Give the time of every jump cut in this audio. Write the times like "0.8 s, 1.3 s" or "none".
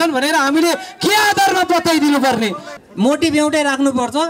2.7 s